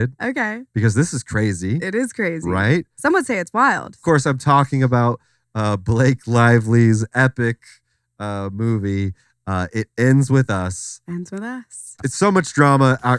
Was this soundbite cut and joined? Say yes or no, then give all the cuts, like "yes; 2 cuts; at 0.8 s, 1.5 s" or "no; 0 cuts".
yes; 2 cuts; at 4.0 s, 11.9 s